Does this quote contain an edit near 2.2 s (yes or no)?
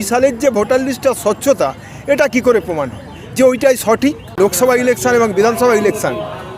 no